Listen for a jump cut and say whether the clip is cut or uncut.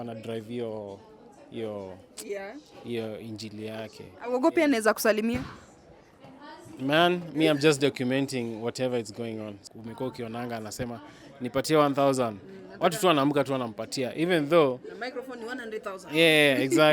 cut